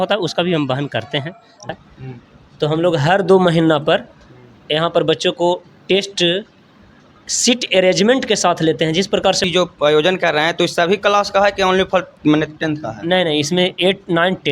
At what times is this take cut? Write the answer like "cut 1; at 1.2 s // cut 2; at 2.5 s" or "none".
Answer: cut 1; at 1.7 s // cut 2; at 9.4 s